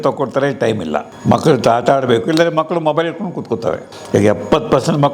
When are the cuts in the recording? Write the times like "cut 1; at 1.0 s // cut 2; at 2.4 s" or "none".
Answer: cut 1; at 1.1 s // cut 2; at 3.9 s